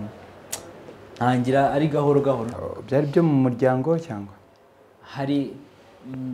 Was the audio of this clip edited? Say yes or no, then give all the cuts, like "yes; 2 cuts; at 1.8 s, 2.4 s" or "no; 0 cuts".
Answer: yes; 1 cut; at 2.5 s